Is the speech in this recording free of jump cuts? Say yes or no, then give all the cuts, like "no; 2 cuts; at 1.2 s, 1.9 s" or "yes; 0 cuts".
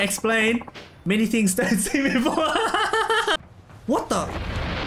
no; 1 cut; at 3.4 s